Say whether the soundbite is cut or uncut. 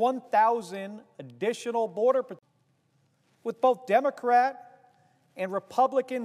uncut